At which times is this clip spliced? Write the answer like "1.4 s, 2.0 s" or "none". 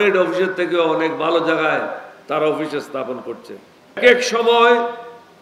4.0 s